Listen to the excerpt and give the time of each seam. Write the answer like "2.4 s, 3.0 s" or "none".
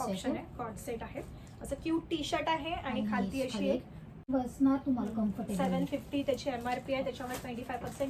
4.2 s